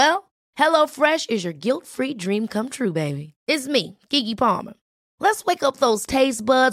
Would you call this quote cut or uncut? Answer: uncut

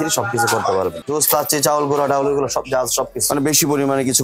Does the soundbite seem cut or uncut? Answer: cut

